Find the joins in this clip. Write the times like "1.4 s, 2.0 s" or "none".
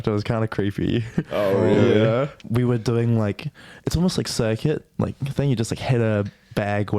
2.4 s